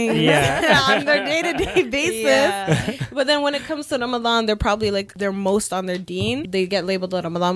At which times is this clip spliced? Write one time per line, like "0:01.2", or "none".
0:05.1
0:06.4